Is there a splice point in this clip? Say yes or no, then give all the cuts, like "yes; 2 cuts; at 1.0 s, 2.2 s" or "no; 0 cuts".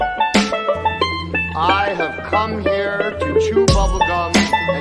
yes; 1 cut; at 0.9 s